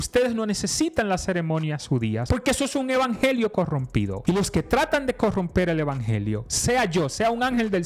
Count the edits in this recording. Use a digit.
2